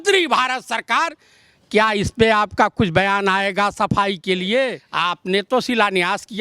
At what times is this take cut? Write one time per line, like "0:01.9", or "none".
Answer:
0:04.8